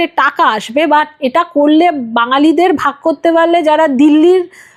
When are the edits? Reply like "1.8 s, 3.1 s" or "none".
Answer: none